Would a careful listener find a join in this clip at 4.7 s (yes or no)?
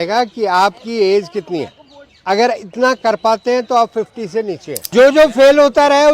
yes